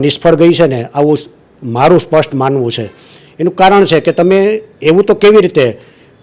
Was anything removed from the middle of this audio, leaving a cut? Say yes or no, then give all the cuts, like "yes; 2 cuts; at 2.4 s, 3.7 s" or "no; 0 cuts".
no; 0 cuts